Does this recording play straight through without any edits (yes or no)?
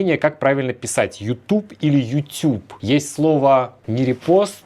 no